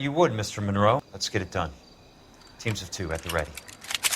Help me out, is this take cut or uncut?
cut